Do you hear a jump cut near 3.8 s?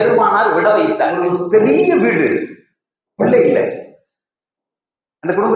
no; 1 cut; at 1.2 s

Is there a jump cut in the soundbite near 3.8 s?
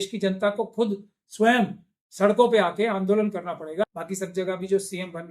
yes; 1 cut; at 3.8 s

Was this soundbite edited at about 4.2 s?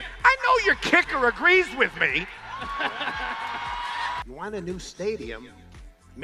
yes; 1 cut; at 4.2 s

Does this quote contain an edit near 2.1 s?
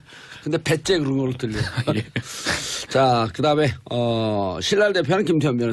yes; 1 cut; at 2.1 s

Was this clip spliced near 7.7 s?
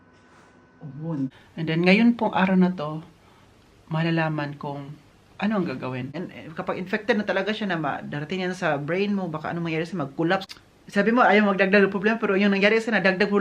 no; 3 cuts; at 1.4 s, 6.2 s, 10.5 s

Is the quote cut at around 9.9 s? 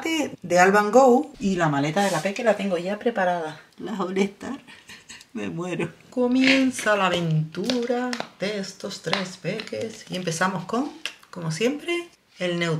no; 3 cuts; at 1.3 s, 3.7 s, 6.0 s

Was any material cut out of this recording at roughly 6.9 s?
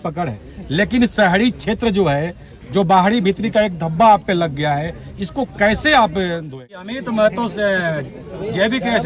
yes; 1 cut; at 6.9 s

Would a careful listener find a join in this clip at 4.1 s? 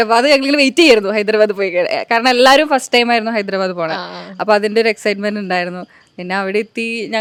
no; 0 cuts

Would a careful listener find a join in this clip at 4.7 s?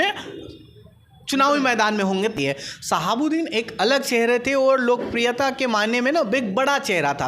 no; 1 cut; at 2.3 s

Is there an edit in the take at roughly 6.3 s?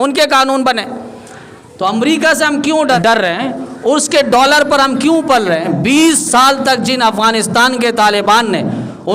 no; 1 cut; at 3.0 s

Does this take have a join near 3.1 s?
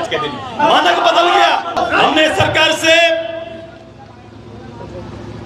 no; 1 cut; at 1.8 s

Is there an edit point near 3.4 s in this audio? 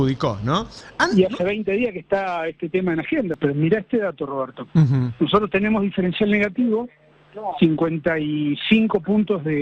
yes; 1 cut; at 3.4 s

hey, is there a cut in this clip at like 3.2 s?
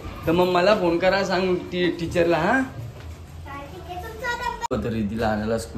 no; 1 cut; at 4.7 s

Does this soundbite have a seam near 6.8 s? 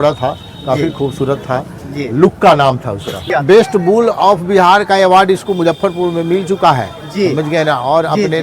no; 1 cut; at 3.3 s

